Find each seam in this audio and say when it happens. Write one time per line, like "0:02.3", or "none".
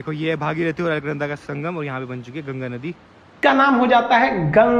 0:03.4